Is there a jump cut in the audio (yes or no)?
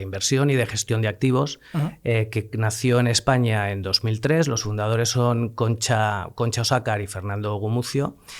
no